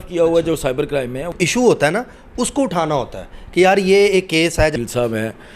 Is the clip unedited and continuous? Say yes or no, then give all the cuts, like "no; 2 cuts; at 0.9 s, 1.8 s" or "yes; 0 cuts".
no; 2 cuts; at 1.3 s, 4.7 s